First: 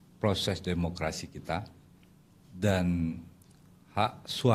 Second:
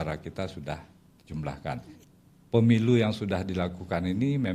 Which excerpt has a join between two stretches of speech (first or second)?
second